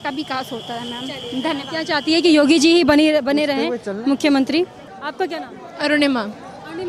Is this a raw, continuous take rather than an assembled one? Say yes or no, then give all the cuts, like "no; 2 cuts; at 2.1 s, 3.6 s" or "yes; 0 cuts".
yes; 0 cuts